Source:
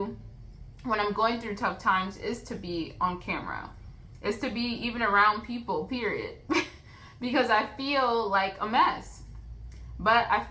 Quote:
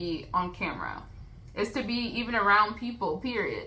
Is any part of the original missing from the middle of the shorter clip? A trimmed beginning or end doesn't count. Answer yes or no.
no